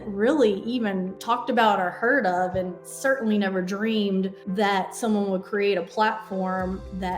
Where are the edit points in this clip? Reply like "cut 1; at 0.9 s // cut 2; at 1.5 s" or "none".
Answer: cut 1; at 1.1 s // cut 2; at 4.4 s